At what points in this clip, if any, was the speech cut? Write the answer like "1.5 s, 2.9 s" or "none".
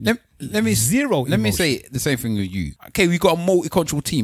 2.7 s

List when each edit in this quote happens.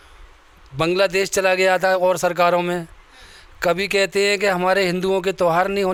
none

